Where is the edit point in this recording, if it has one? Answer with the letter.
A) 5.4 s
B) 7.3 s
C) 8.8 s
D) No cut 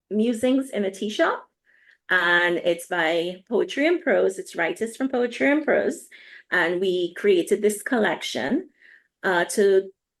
D